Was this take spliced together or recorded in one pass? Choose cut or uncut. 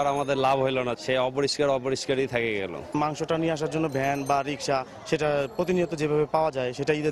uncut